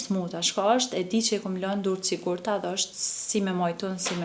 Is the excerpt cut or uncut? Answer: uncut